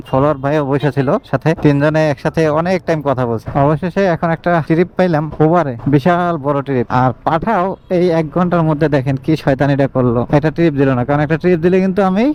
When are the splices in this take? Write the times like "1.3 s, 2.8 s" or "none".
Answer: none